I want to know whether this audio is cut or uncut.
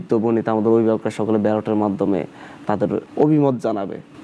cut